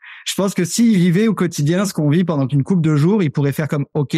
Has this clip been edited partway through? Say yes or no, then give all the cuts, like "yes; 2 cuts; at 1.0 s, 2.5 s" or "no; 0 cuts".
no; 0 cuts